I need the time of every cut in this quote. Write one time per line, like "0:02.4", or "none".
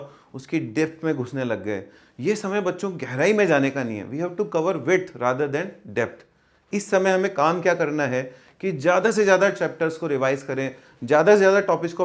none